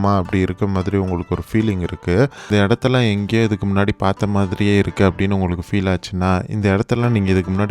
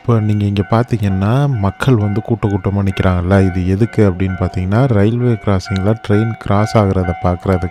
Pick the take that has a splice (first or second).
first